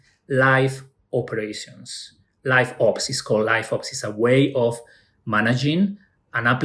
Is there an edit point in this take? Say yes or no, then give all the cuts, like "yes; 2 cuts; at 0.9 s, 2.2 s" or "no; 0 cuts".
no; 0 cuts